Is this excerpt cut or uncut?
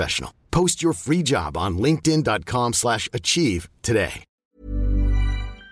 cut